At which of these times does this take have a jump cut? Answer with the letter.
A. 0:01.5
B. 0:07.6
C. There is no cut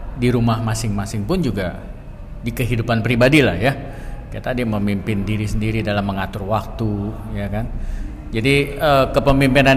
C